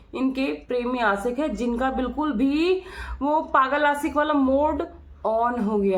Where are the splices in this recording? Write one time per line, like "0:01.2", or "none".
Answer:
none